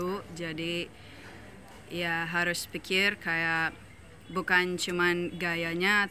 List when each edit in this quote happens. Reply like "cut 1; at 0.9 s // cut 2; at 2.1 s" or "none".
none